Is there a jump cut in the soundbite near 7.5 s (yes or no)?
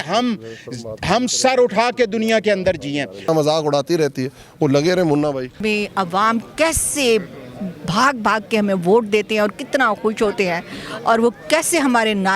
no